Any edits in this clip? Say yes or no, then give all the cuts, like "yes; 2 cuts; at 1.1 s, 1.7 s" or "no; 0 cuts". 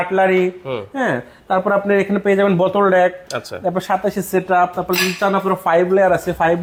no; 0 cuts